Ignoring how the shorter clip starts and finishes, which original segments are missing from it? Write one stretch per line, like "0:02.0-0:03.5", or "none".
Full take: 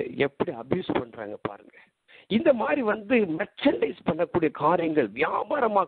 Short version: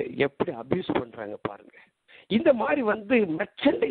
none